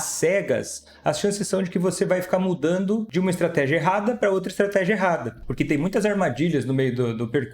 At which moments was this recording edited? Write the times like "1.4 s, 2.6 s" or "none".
3.1 s, 5.4 s